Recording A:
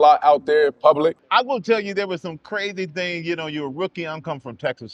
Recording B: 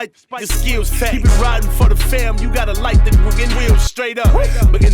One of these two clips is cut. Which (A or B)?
A